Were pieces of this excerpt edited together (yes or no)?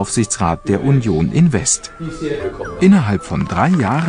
yes